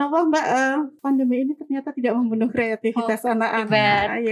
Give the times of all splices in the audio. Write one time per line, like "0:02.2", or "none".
0:00.9